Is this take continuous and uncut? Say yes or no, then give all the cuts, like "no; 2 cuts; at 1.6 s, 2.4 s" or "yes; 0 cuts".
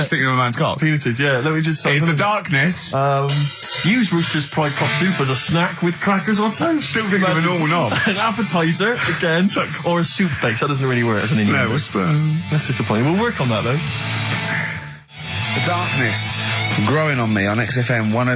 yes; 0 cuts